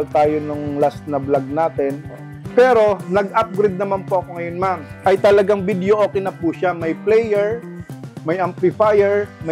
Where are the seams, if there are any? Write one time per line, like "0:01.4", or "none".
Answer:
0:02.3
0:04.8